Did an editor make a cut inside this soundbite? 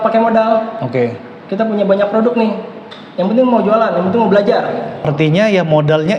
yes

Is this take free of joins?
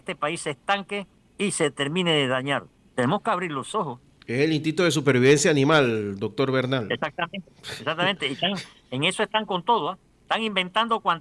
no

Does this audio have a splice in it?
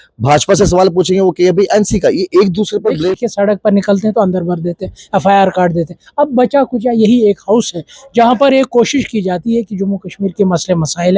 yes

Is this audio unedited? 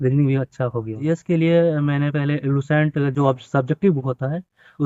no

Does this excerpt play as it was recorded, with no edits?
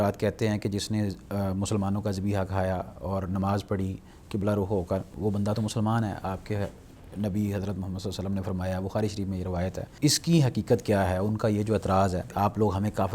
no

